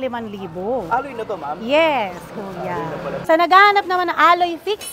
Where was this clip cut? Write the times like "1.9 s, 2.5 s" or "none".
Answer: 3.1 s